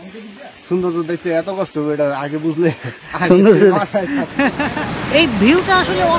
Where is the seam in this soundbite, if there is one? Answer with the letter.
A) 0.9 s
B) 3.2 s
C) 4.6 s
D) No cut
C